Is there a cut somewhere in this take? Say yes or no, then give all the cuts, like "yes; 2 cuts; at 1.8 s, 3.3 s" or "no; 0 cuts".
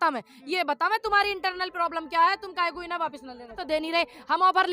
yes; 1 cut; at 3.6 s